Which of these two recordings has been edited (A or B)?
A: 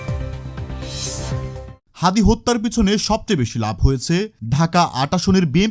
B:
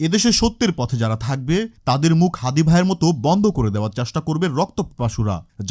A